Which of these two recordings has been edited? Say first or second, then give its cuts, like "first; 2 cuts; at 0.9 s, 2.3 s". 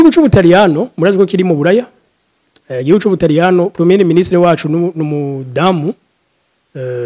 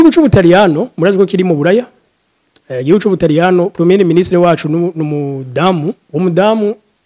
second; 1 cut; at 6.0 s